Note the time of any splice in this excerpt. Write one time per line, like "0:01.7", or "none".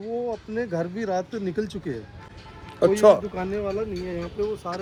none